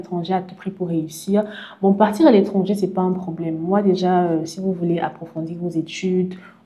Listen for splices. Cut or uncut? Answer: uncut